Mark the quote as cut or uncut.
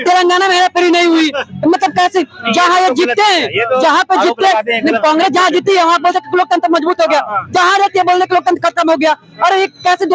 uncut